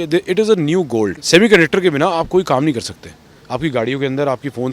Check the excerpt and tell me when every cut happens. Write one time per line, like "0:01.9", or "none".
0:01.2